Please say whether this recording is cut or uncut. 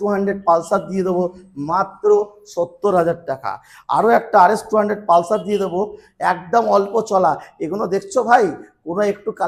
uncut